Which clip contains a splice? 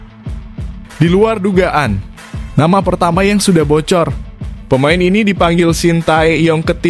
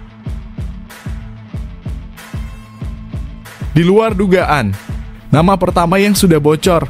first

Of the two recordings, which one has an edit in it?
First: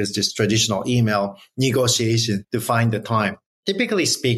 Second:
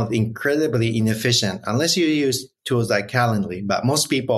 first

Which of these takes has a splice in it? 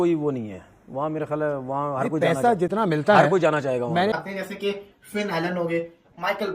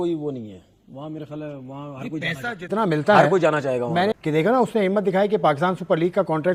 first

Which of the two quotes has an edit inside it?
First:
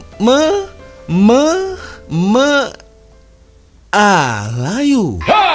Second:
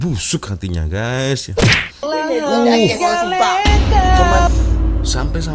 second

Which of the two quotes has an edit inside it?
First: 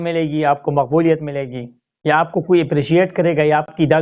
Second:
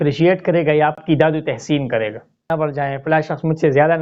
second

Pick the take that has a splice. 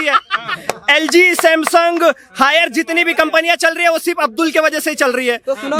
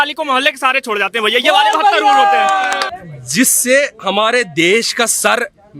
second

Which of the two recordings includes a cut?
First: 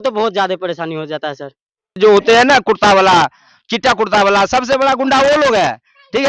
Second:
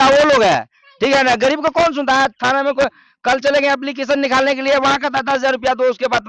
first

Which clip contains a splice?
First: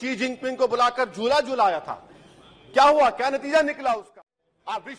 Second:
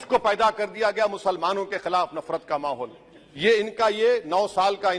first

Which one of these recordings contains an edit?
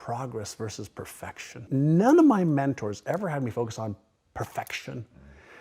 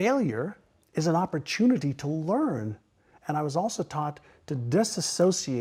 first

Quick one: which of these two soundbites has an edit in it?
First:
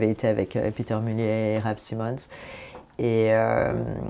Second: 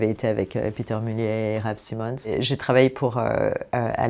second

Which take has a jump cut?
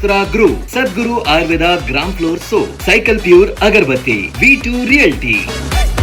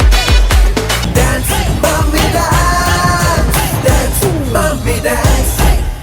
second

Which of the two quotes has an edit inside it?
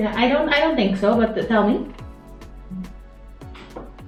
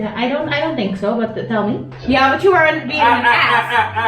second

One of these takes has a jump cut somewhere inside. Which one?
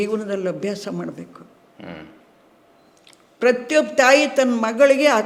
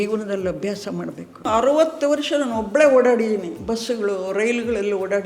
second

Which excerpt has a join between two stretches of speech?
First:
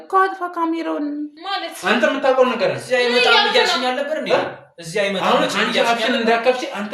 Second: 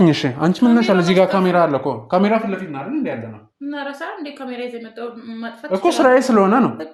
first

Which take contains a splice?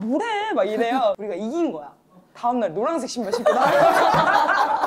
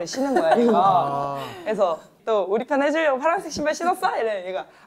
first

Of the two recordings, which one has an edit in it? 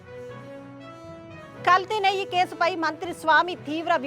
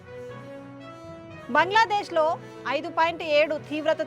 second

